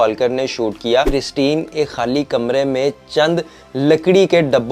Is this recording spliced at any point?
yes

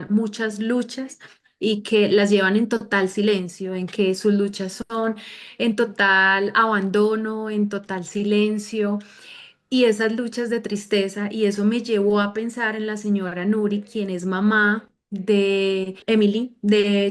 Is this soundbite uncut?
no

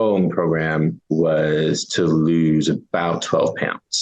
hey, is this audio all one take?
no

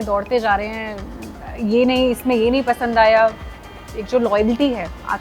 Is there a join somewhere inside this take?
yes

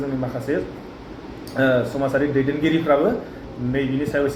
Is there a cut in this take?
no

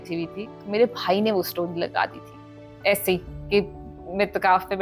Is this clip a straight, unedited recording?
yes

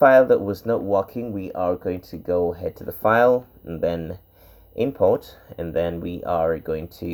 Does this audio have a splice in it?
no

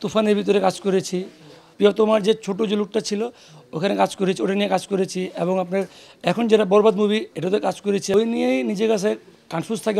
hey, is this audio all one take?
no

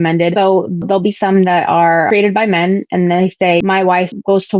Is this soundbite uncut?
no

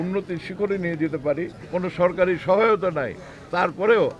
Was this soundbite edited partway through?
yes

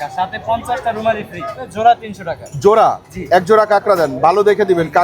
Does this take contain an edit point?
yes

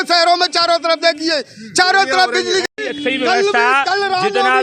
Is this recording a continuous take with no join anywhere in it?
yes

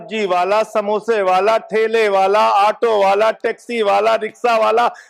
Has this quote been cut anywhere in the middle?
no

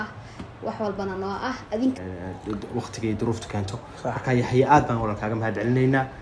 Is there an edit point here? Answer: yes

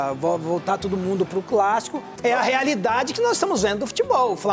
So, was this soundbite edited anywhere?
yes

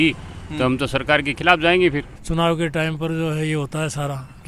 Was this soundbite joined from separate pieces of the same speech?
yes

